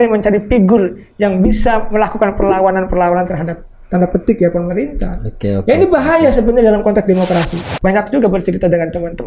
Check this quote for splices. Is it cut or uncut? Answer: cut